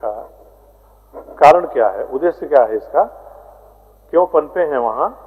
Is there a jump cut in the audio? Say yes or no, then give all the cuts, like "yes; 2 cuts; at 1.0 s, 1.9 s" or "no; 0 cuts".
no; 0 cuts